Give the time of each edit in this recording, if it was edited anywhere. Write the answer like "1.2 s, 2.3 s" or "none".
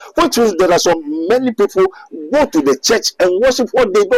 none